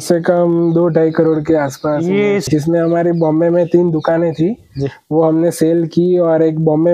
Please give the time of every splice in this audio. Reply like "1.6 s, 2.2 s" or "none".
2.4 s